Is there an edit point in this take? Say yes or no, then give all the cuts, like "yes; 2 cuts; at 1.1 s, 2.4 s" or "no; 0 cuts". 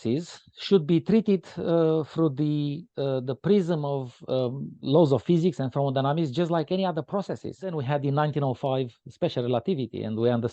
yes; 1 cut; at 7.8 s